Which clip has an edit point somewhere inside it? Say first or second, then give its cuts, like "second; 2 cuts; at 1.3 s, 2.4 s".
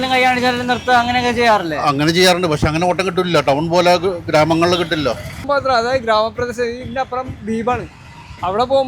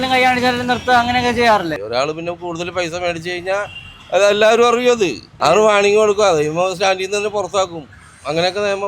second; 2 cuts; at 1.7 s, 5.3 s